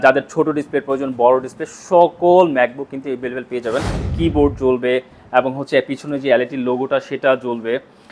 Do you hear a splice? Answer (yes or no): yes